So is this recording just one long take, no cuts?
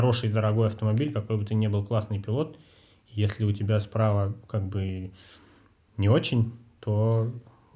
yes; 0 cuts

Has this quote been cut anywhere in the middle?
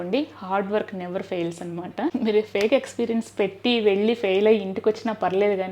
yes; 1 cut; at 2.1 s

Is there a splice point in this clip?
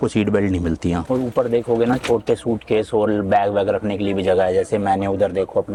no; 0 cuts

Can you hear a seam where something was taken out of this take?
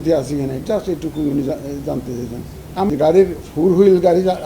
yes; 1 cut; at 2.9 s

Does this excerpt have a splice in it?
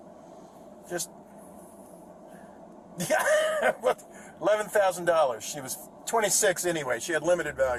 no; 0 cuts

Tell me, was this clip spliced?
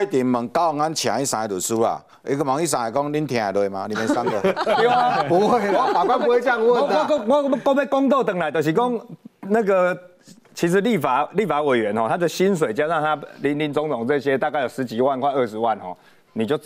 no; 0 cuts

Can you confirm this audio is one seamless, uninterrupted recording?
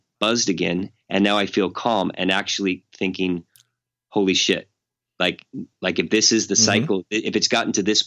no; 1 cut; at 5.7 s

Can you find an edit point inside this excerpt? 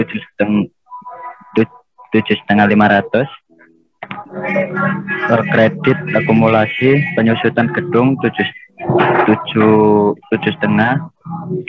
no; 0 cuts

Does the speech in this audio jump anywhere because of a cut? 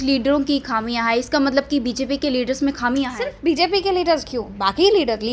no; 0 cuts

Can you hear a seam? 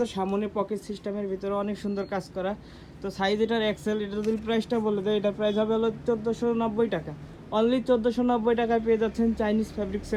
no; 0 cuts

